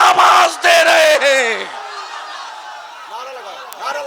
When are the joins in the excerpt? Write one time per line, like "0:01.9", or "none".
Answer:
none